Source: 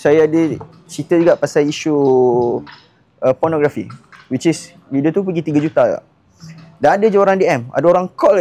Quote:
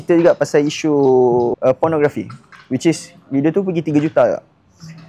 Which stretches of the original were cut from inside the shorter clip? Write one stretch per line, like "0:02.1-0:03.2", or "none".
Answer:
0:02.6-0:03.2